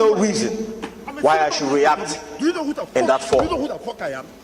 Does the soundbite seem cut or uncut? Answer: cut